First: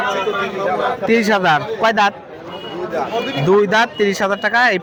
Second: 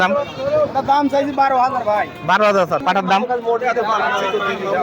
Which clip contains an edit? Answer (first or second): second